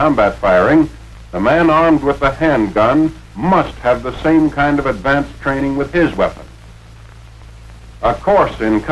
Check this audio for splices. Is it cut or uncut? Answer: uncut